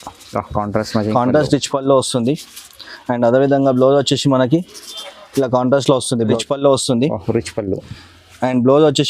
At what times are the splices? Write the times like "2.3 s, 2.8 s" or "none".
6.4 s

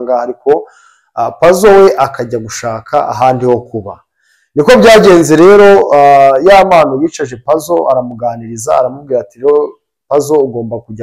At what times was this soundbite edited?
none

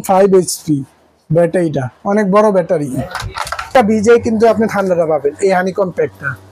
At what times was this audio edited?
3.7 s

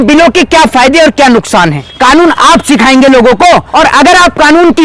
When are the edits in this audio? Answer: 1.8 s, 3.7 s

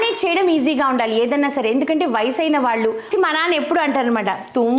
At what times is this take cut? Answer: 3.1 s

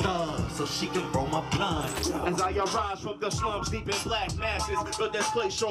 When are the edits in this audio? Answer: 1.9 s

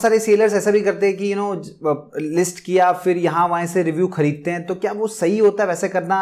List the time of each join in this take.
none

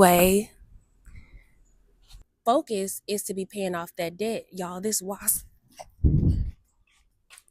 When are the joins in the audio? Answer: 2.2 s

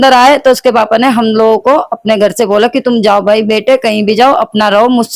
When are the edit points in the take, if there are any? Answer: none

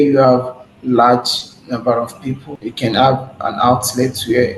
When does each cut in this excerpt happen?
2.5 s

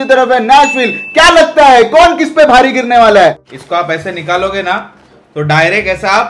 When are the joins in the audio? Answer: 3.4 s

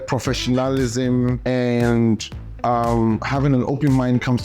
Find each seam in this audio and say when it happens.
1.4 s, 3.2 s

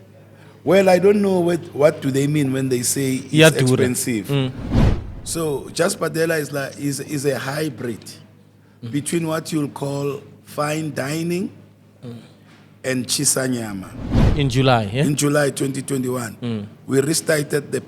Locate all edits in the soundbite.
4.7 s, 14.3 s

